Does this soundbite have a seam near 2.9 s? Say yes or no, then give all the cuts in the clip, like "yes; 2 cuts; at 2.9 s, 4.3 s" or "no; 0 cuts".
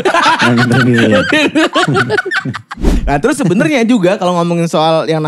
yes; 1 cut; at 2.9 s